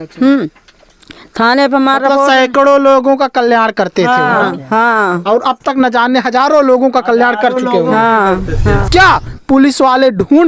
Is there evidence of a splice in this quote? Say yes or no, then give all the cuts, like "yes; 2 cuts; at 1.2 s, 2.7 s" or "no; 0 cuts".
yes; 1 cut; at 8.8 s